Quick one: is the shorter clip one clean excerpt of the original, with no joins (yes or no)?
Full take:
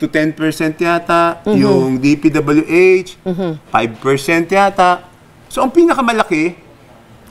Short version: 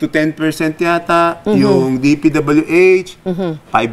yes